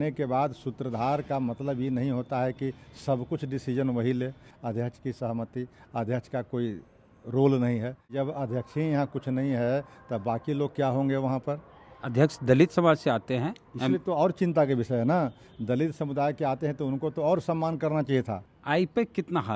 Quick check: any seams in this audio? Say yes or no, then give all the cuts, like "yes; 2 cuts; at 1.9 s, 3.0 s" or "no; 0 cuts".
yes; 3 cuts; at 4.5 s, 8.1 s, 18.5 s